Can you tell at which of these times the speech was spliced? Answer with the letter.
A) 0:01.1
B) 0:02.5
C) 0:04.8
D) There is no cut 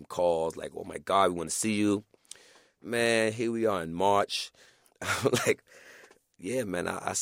C